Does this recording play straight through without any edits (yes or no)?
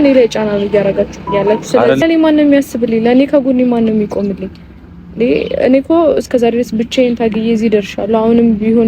no